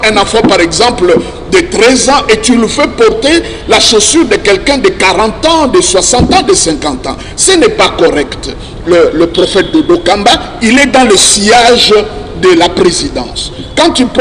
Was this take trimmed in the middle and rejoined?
yes; 1 cut; at 8.7 s

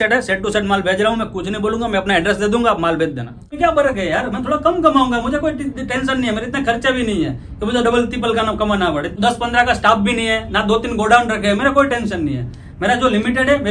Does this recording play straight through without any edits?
no; 2 cuts; at 3.5 s, 9.1 s

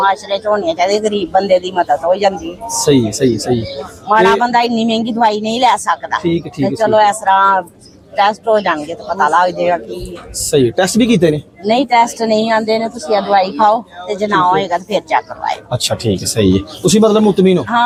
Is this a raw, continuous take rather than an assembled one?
yes; 0 cuts

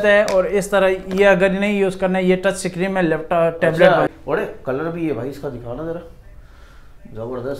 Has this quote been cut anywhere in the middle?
yes; 1 cut; at 4.1 s

